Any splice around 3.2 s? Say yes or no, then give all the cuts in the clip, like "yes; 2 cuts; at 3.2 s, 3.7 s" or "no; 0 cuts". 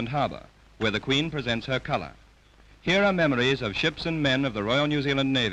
no; 1 cut; at 1.4 s